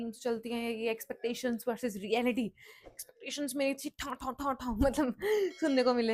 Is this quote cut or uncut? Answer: uncut